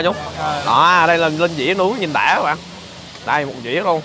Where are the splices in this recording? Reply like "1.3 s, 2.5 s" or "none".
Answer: none

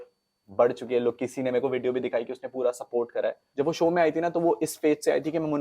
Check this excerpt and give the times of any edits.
3.4 s

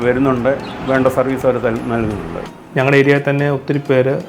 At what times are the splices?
2.6 s

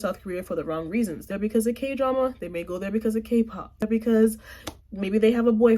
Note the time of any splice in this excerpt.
1.2 s, 3.9 s

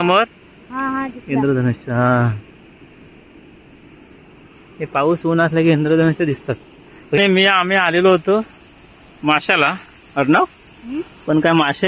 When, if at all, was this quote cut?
7.2 s

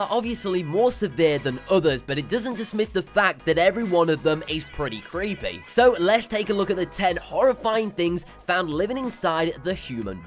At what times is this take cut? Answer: 2.1 s

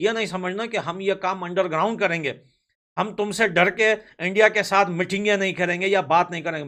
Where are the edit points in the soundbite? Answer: none

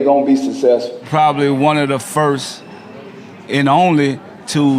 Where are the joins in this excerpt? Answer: 1.0 s

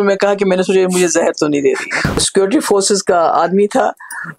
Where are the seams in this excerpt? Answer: 2.2 s

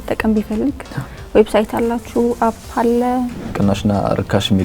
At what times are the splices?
3.4 s

